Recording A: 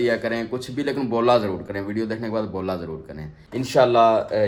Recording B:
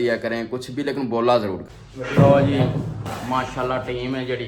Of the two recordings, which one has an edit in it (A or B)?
B